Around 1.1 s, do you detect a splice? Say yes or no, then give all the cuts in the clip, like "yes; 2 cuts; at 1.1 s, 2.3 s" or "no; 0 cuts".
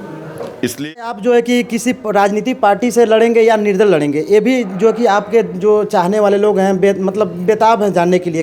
yes; 1 cut; at 1.1 s